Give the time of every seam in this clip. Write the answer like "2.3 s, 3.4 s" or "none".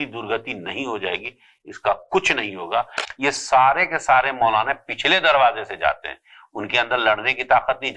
3.0 s